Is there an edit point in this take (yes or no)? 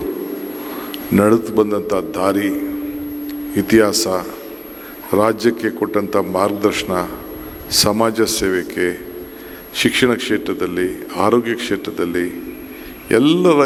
no